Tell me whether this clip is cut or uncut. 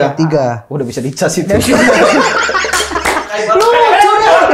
uncut